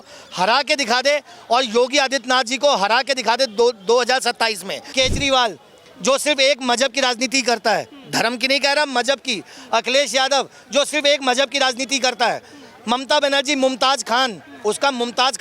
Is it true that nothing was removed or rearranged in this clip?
no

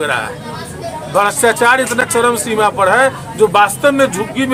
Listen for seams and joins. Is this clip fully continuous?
yes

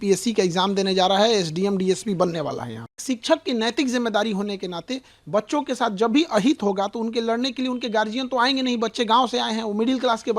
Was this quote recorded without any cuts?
no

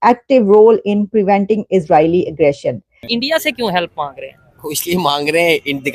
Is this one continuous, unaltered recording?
no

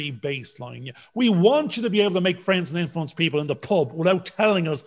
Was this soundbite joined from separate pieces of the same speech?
no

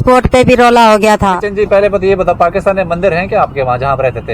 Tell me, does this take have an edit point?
yes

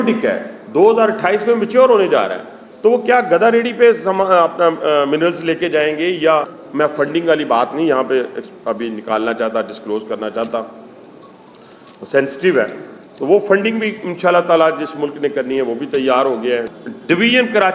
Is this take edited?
yes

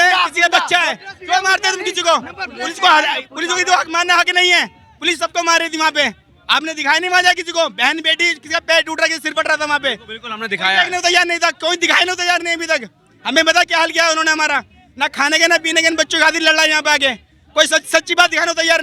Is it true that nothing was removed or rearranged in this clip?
yes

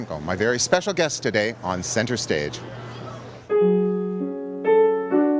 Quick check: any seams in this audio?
yes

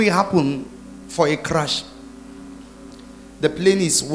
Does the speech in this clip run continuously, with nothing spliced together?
no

